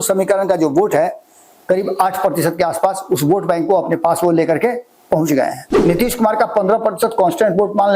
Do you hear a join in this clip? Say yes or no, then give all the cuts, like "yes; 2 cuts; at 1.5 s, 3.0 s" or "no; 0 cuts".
yes; 1 cut; at 5.7 s